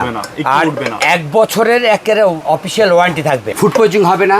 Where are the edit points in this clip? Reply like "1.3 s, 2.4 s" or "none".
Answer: 2.4 s, 3.5 s